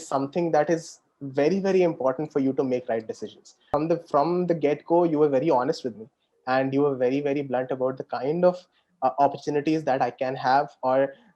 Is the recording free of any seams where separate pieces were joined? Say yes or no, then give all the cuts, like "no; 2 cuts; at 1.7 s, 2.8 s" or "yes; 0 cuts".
no; 1 cut; at 3.7 s